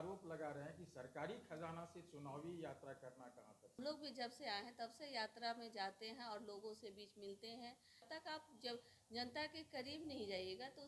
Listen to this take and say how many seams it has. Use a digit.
2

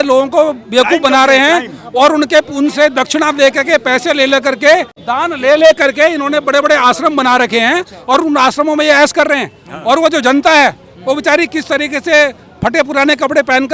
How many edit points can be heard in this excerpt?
1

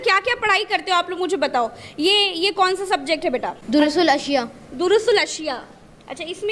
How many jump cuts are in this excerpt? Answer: 1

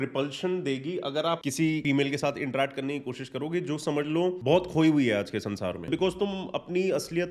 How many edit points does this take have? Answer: 3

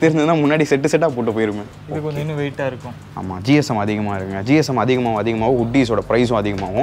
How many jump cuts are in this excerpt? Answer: 1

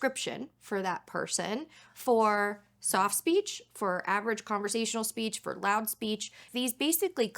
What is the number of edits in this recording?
1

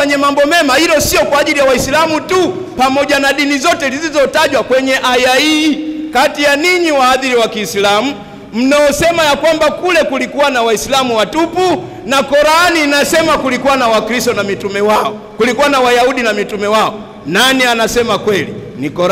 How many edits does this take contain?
0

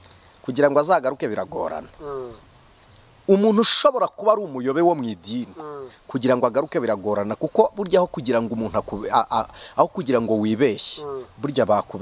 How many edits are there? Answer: 0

